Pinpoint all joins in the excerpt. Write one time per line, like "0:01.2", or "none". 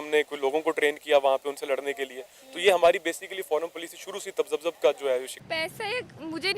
0:05.3